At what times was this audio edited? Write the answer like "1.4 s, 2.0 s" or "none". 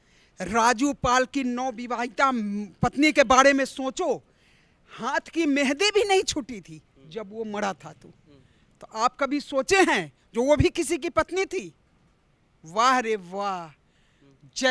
none